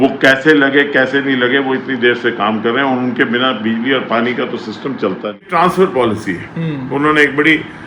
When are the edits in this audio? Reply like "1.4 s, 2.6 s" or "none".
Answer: 5.5 s